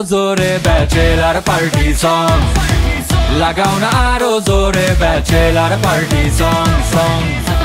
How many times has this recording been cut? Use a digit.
0